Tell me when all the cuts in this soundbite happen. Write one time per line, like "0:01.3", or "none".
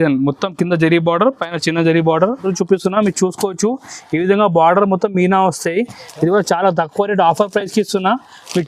0:02.4